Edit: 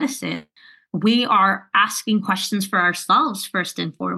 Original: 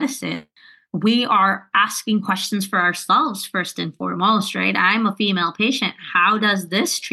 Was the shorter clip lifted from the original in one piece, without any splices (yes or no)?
yes